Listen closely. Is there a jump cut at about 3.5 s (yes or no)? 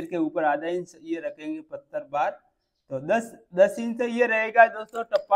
no